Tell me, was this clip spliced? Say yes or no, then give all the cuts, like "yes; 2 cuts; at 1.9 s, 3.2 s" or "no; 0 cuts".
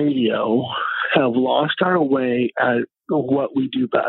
no; 0 cuts